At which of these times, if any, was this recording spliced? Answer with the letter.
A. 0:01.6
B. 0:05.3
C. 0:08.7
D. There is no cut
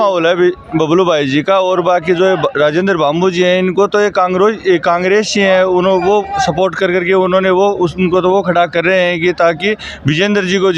D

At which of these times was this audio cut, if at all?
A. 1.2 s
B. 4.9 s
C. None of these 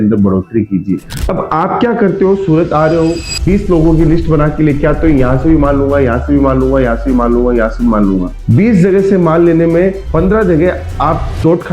A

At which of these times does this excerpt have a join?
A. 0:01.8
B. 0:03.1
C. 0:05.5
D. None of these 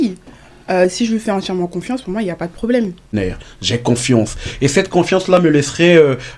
B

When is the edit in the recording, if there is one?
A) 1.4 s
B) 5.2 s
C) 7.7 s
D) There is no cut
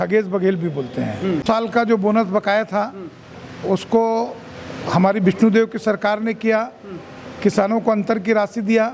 A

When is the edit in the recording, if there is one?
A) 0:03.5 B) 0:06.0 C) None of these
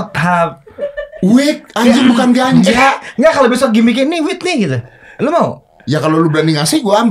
C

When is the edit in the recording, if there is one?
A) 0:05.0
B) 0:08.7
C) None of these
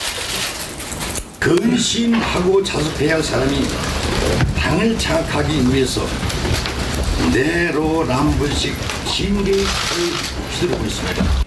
B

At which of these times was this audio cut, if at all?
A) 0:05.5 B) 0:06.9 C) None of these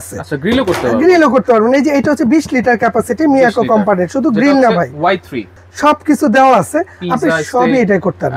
A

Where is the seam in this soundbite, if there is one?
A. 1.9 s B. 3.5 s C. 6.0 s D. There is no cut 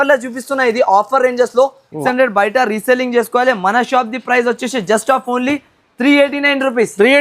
A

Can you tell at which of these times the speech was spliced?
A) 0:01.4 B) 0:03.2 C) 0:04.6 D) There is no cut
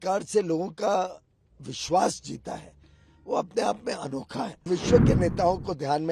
C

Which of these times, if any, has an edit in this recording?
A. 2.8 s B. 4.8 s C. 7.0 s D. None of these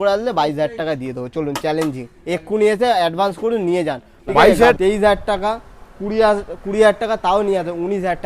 B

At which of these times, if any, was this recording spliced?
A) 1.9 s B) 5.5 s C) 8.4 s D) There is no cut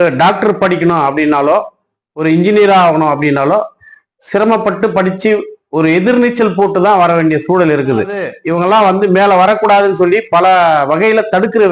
C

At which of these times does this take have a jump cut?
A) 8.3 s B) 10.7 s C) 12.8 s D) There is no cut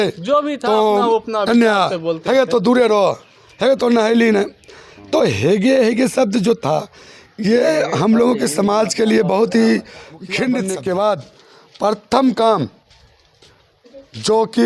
B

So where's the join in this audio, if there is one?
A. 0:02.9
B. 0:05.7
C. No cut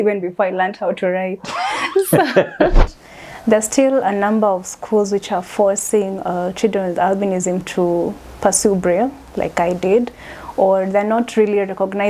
A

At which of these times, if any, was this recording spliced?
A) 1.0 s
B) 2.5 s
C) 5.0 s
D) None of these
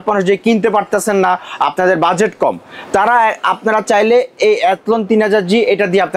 D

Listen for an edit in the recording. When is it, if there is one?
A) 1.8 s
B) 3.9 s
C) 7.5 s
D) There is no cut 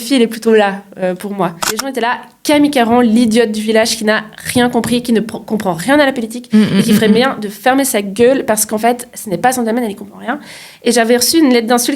A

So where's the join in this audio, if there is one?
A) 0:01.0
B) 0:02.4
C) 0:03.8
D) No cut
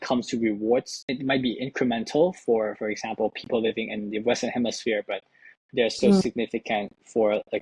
A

